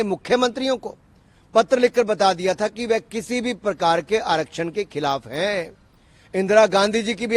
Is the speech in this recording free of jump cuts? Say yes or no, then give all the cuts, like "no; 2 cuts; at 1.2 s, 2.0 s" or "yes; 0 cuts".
yes; 0 cuts